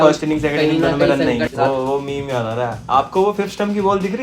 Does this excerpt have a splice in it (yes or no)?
yes